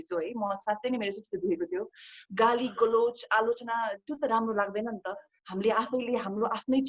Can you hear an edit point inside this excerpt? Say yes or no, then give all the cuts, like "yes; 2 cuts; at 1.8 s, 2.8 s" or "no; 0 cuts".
no; 0 cuts